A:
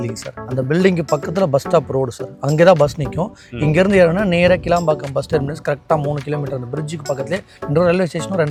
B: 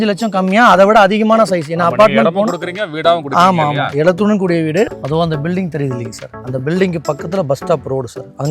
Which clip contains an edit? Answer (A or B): B